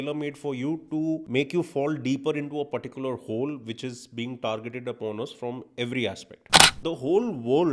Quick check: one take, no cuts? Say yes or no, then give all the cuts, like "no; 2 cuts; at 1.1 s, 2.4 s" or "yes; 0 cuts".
no; 2 cuts; at 1.2 s, 6.7 s